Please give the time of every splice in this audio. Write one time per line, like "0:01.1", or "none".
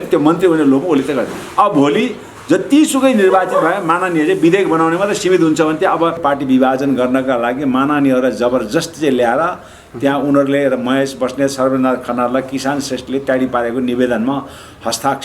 0:06.2